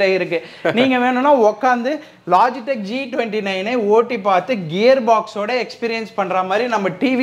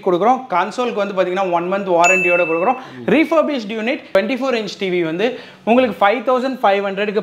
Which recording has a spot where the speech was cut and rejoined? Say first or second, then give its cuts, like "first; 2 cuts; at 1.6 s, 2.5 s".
second; 1 cut; at 4.1 s